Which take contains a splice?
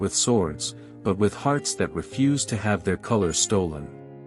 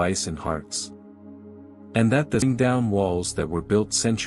second; 1 cut; at 2.4 s

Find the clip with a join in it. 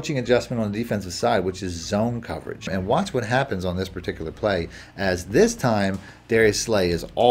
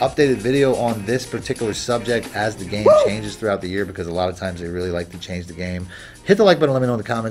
first; 1 cut; at 2.7 s

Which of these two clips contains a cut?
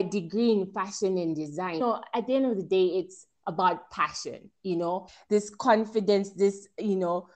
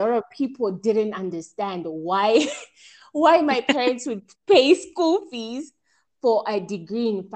first; 2 cuts; at 1.8 s, 5.1 s

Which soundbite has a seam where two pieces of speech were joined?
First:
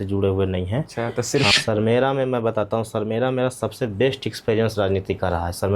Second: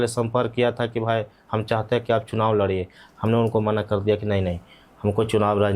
first; 1 cut; at 1.5 s

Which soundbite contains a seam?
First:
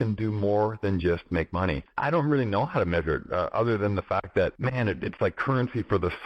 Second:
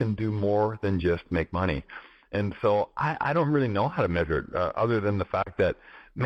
first; 2 cuts; at 1.9 s, 4.6 s

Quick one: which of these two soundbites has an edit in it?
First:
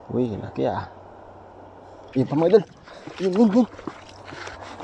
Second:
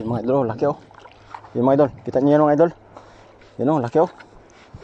first; 1 cut; at 2.0 s

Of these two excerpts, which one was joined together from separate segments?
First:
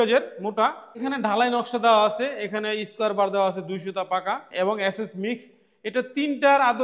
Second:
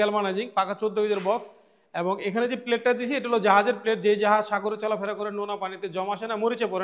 first; 2 cuts; at 1.0 s, 4.5 s

